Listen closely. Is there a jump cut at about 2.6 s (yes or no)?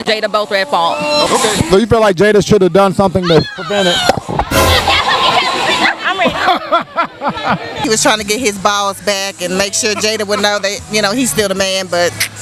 no